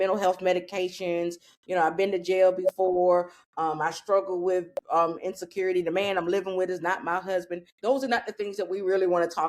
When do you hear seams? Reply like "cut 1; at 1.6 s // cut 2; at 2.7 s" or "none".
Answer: cut 1; at 7.6 s